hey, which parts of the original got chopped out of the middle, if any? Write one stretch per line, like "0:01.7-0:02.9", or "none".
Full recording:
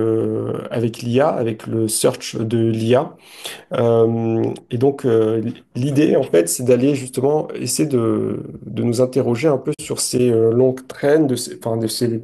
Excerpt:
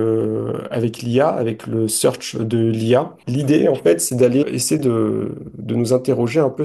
0:03.2-0:05.7
0:07.0-0:07.6